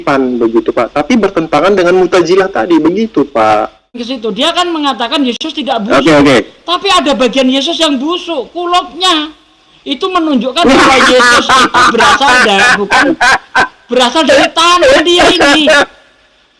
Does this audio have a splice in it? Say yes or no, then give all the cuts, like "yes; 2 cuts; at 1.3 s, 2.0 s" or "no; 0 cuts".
yes; 1 cut; at 4.0 s